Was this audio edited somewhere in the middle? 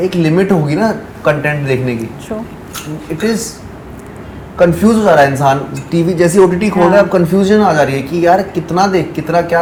no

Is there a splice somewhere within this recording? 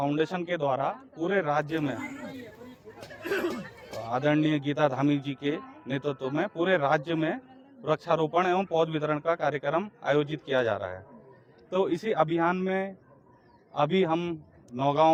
no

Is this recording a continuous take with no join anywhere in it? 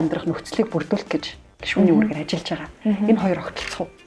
yes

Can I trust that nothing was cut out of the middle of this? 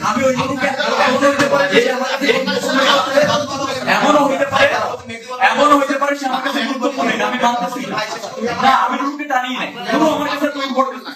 yes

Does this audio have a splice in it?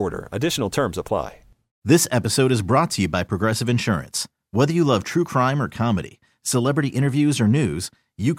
yes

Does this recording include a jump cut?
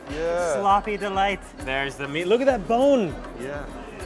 yes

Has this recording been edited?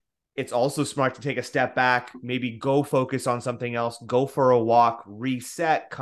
no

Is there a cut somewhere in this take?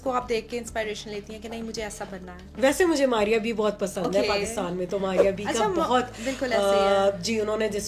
no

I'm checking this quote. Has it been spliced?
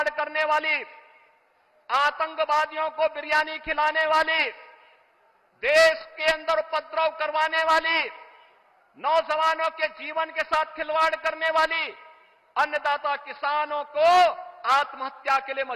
no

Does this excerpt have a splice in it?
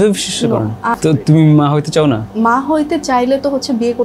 yes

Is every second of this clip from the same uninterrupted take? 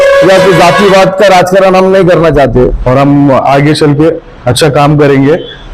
no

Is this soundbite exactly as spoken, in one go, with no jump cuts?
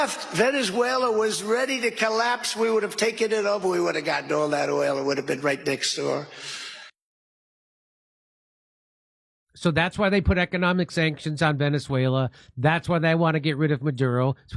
yes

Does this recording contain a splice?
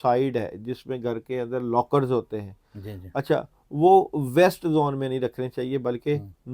no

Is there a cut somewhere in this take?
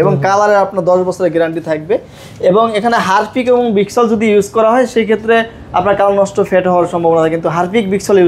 no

